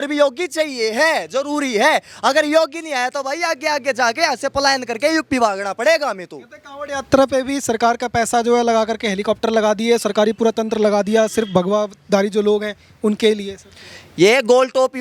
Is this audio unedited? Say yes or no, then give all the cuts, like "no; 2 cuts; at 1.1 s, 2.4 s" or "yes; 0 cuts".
yes; 0 cuts